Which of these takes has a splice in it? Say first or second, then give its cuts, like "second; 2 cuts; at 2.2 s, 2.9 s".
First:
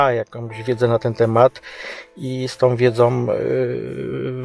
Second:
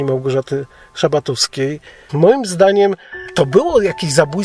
second; 2 cuts; at 2.1 s, 3.2 s